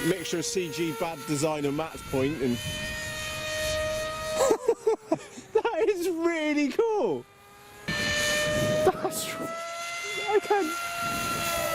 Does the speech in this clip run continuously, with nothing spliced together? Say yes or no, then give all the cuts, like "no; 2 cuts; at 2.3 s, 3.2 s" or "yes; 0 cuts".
no; 1 cut; at 7.9 s